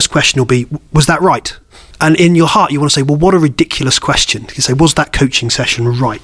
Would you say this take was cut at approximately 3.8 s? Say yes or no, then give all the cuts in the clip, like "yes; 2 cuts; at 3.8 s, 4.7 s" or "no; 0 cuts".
no; 1 cut; at 1.8 s